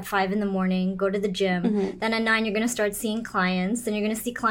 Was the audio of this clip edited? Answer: no; 0 cuts

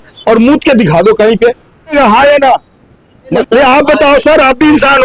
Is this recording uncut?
no; 2 cuts; at 1.9 s, 3.3 s

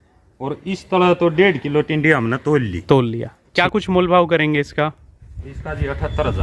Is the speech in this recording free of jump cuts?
no; 1 cut; at 3.4 s

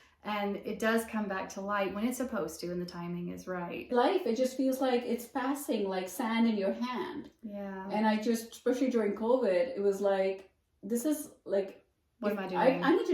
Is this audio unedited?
no; 1 cut; at 3.9 s

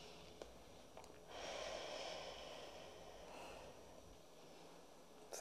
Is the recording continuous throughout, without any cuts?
no; 1 cut; at 4.1 s

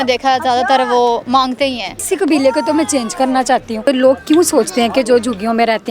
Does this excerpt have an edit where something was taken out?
yes; 2 cuts; at 2.0 s, 3.9 s

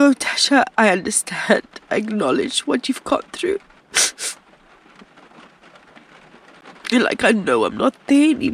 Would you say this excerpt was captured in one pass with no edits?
yes; 0 cuts

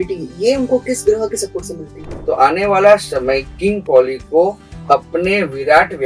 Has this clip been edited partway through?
yes; 1 cut; at 2.1 s

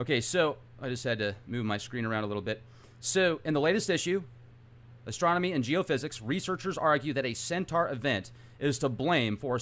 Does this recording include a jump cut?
yes; 1 cut; at 1.0 s

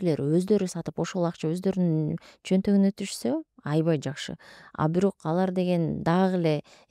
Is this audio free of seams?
yes; 0 cuts

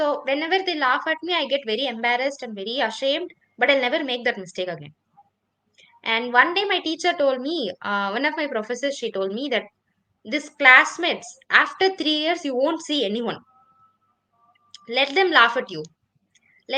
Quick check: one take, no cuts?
yes; 0 cuts

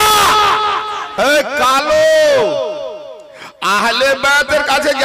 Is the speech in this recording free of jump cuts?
no; 1 cut; at 1.2 s

